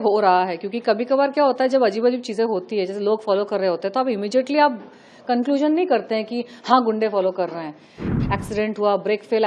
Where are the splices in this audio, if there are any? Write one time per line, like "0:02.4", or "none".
0:08.0